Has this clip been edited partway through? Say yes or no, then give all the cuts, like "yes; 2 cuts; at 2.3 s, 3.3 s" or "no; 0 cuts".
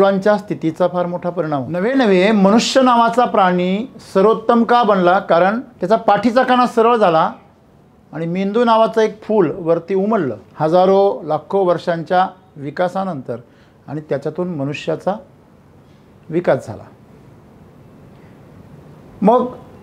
yes; 3 cuts; at 1.8 s, 5.7 s, 10.4 s